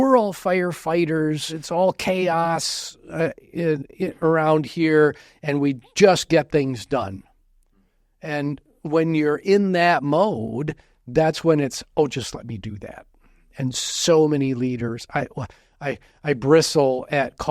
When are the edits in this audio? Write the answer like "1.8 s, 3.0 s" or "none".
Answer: 1.5 s